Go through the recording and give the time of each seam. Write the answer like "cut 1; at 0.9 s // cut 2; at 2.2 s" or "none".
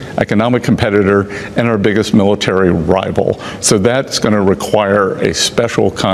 none